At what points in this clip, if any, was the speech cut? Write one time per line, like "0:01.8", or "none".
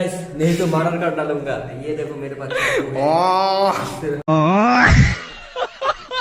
0:04.2